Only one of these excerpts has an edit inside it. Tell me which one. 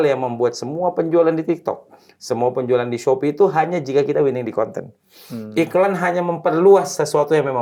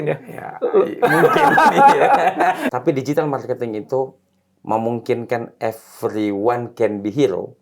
second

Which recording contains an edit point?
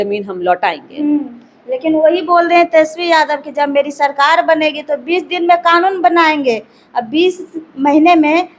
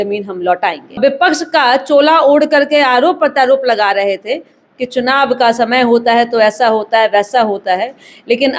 second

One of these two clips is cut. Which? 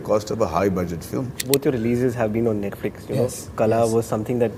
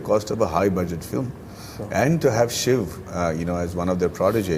first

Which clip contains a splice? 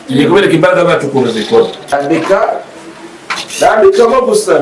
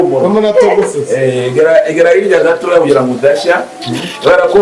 first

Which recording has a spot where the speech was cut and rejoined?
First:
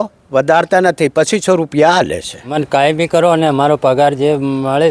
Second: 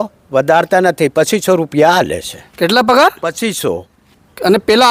first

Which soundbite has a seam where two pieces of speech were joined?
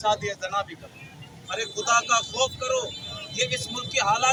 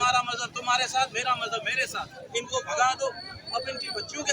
second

